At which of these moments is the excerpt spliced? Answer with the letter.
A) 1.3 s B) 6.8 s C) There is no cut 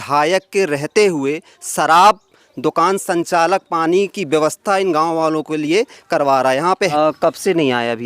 B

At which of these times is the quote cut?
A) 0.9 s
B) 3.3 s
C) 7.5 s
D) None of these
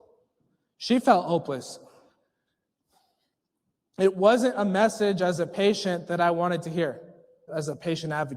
C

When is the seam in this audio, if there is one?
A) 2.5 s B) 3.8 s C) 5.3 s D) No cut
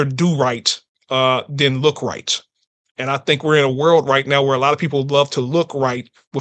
D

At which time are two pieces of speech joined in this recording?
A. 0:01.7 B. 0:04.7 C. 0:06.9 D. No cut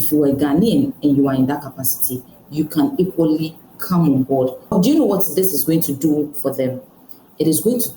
B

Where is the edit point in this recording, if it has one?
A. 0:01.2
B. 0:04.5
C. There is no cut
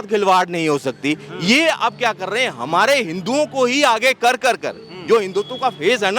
C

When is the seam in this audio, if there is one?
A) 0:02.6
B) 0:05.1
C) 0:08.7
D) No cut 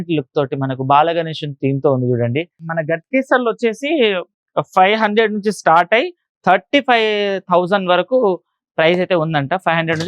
A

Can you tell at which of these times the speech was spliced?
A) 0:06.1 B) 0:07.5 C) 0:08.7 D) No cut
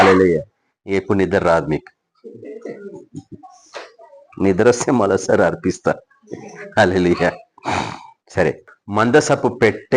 C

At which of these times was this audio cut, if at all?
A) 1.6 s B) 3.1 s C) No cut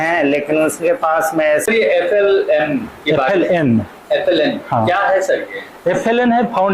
A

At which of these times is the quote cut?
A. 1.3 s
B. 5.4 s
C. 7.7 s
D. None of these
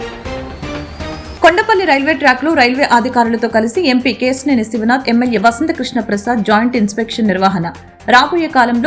A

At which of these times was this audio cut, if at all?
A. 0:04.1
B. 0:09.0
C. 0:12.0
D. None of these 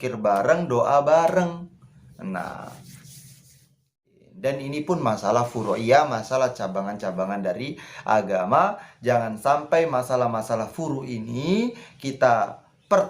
A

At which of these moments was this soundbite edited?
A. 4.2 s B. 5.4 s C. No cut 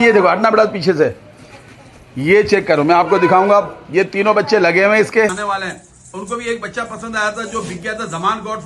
B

